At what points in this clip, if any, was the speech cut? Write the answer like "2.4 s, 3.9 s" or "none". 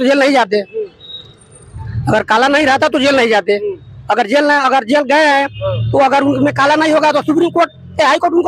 none